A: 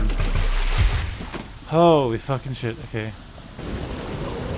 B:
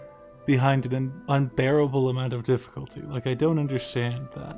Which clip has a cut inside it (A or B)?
B